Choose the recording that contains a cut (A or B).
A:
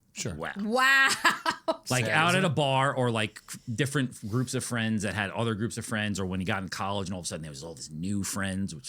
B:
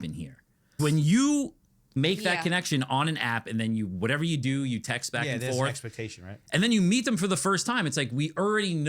B